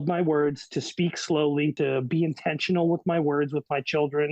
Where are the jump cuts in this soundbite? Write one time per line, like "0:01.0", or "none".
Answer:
0:01.7